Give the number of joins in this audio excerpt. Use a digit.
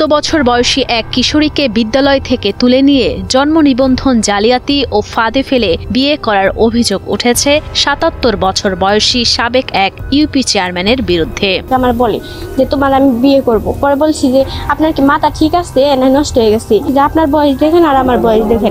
0